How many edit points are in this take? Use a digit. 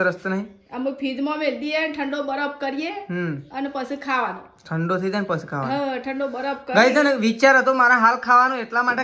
0